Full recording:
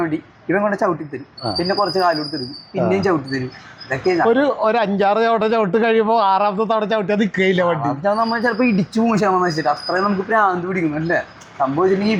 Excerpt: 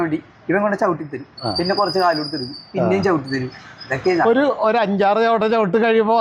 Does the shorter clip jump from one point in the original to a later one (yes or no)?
no